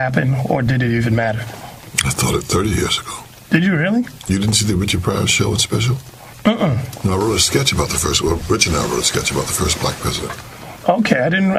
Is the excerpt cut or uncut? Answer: uncut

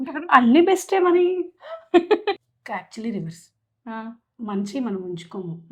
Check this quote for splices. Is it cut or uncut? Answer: uncut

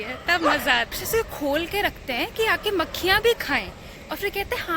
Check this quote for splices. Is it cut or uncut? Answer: cut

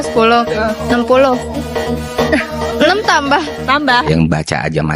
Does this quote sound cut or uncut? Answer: cut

